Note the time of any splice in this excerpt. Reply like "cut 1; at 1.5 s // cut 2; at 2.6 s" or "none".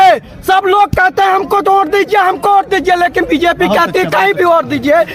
none